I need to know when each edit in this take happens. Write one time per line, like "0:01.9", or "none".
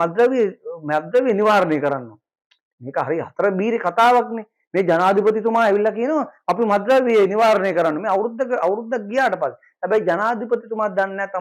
none